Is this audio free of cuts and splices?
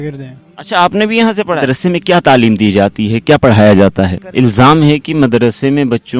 no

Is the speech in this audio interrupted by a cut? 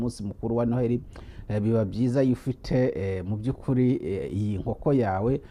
no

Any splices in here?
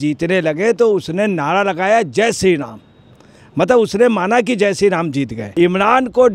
yes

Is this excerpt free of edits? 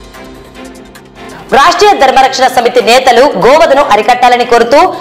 no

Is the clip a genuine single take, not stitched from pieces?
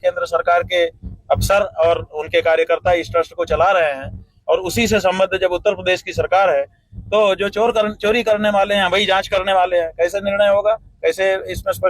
no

